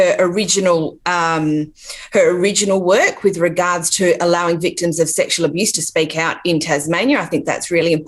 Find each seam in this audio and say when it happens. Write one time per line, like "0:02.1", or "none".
none